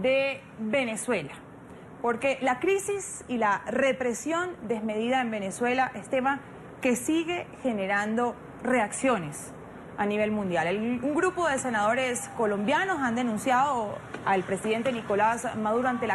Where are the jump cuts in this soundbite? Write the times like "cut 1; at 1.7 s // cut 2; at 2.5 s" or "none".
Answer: cut 1; at 12.2 s